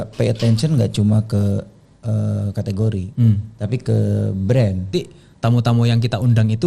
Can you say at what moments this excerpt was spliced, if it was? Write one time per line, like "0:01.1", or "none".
0:04.9